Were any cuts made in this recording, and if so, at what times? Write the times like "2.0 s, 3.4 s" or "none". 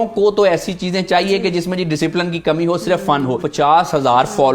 3.4 s